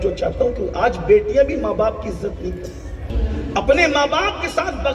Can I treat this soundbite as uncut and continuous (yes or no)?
no